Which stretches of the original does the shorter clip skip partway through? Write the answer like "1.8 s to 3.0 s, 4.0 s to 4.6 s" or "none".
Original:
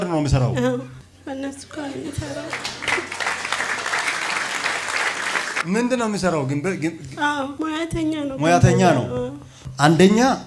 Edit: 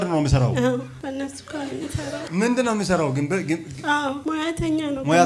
0.9 s to 1.2 s, 2.5 s to 5.6 s